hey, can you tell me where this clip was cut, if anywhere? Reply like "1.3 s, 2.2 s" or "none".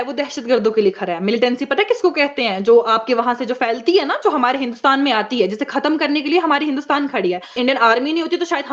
7.6 s